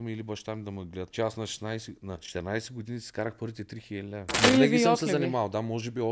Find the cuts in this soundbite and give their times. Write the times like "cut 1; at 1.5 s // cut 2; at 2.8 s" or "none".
cut 1; at 1.1 s // cut 2; at 2.3 s // cut 3; at 4.3 s